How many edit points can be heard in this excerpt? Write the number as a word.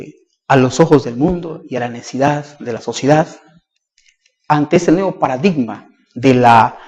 one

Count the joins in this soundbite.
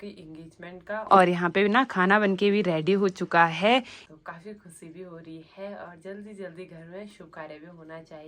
two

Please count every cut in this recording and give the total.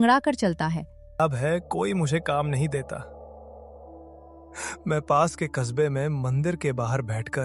one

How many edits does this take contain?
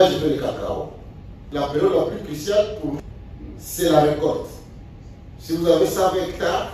two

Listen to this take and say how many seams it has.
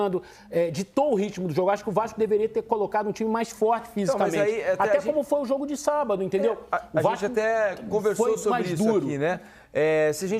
zero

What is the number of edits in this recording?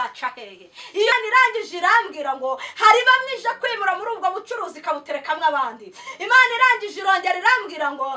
one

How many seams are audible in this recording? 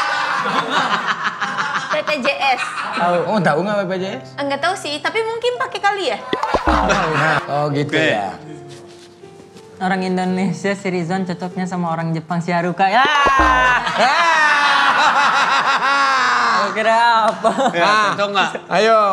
one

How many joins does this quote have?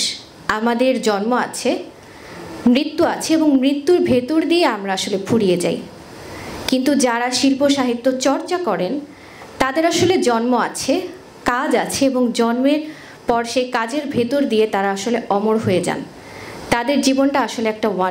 zero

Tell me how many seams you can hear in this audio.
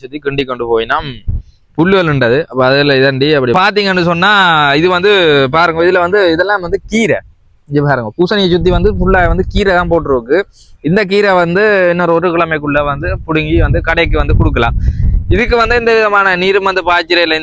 one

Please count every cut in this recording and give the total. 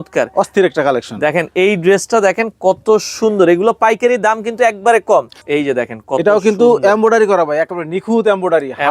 one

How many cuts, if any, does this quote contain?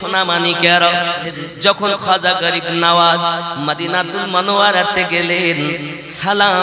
one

